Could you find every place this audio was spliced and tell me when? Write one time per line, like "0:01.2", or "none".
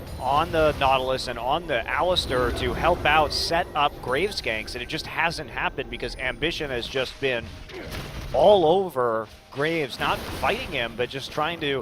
0:02.2